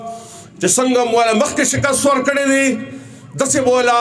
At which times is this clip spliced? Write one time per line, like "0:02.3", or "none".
none

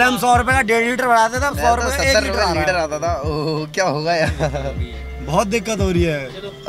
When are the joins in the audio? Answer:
none

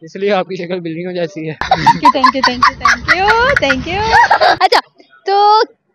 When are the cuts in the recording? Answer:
none

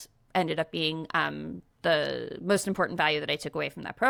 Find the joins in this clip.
none

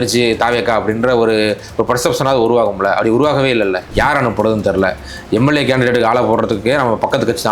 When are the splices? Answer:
0:03.8

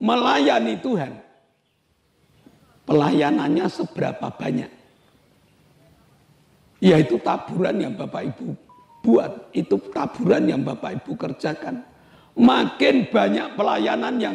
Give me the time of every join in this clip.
none

